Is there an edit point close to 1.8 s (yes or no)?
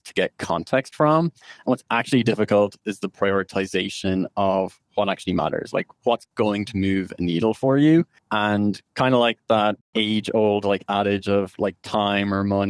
no